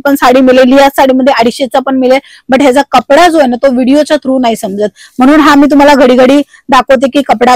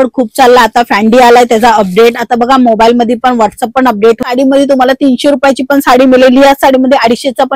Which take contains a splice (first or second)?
second